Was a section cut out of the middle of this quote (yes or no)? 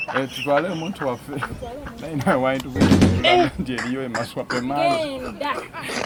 no